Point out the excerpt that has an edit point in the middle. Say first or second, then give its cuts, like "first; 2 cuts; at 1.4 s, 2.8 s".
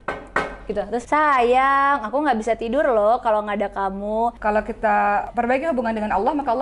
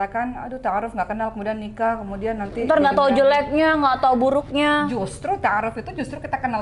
first; 2 cuts; at 1.0 s, 4.4 s